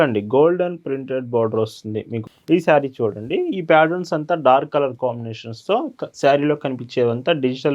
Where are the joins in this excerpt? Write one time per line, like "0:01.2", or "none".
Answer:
0:02.2